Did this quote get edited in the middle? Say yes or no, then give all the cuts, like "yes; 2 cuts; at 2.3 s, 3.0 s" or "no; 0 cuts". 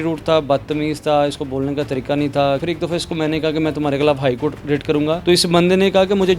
yes; 2 cuts; at 2.6 s, 5.2 s